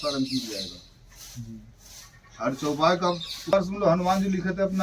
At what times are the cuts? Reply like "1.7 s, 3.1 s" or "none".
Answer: 3.5 s